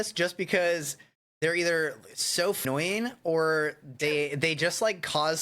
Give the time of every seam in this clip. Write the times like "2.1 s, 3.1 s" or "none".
2.6 s